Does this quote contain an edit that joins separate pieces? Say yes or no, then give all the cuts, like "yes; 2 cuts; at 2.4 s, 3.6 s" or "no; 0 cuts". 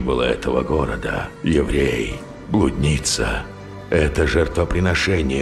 no; 0 cuts